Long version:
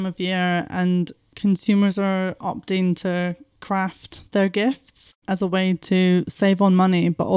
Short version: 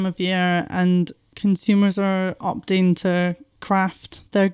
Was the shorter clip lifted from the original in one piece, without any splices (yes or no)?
yes